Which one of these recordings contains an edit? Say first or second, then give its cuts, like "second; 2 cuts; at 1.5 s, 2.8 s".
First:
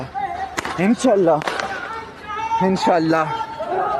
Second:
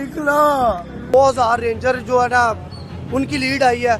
second; 1 cut; at 1.1 s